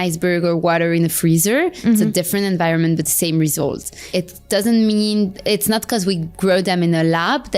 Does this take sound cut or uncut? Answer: cut